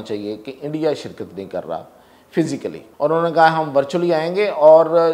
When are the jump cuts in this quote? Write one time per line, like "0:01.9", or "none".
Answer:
0:02.8